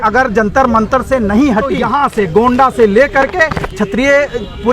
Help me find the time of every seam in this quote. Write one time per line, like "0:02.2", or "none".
0:01.8